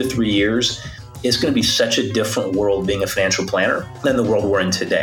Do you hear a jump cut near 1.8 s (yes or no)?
no